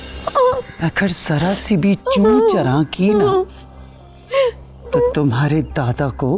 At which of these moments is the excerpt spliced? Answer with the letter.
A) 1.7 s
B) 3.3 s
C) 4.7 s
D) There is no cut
D